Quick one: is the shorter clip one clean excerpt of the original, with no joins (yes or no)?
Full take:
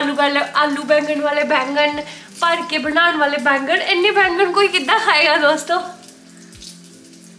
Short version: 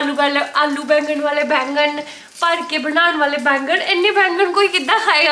yes